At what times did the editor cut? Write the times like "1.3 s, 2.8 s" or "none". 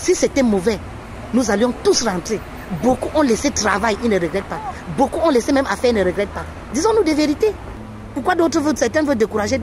8.1 s